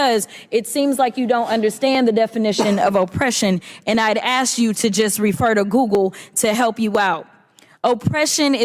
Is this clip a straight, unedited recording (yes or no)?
yes